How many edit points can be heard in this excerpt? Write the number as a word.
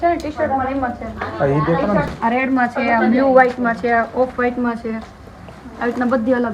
one